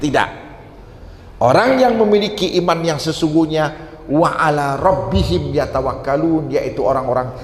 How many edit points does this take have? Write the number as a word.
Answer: zero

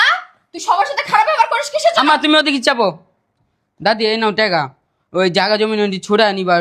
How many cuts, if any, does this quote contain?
zero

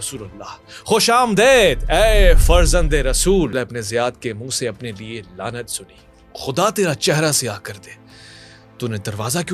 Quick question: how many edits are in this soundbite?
one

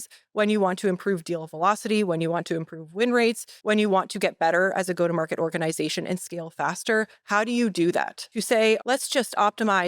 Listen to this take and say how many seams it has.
two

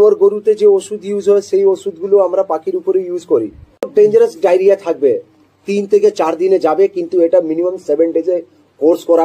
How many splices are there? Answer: one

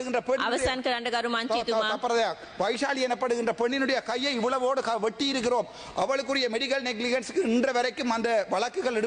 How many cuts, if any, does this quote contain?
zero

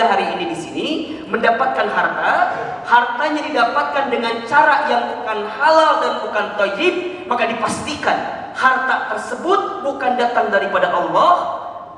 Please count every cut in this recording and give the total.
zero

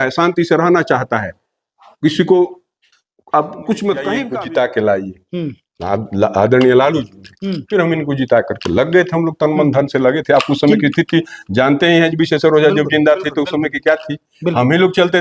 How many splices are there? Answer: one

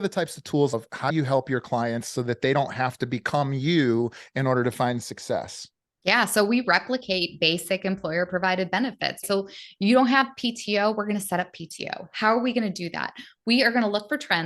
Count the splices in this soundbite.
two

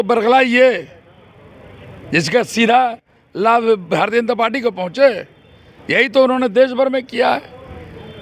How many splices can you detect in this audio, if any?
zero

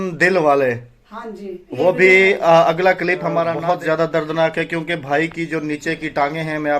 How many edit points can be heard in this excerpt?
one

